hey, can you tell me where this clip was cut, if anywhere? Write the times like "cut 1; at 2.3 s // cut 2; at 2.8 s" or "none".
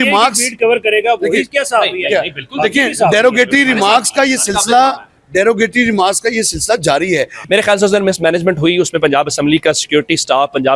cut 1; at 7.4 s